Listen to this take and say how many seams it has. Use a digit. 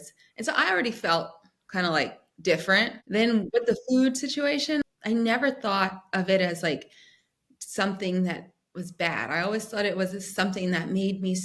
2